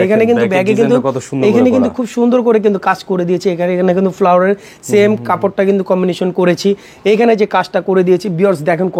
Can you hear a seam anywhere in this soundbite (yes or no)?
no